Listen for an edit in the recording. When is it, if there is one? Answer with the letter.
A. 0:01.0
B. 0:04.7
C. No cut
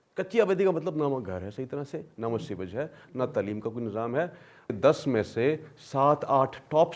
B